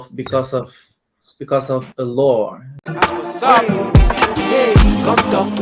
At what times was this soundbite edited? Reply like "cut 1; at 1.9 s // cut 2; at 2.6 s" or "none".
cut 1; at 2.9 s